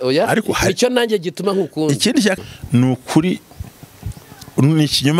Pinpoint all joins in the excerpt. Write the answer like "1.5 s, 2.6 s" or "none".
2.3 s